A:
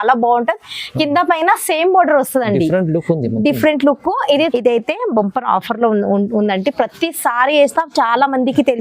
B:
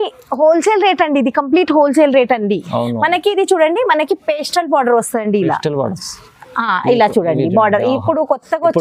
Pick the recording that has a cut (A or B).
A